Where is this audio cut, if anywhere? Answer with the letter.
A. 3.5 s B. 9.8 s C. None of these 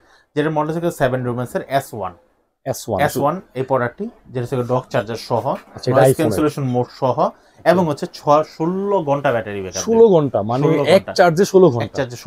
C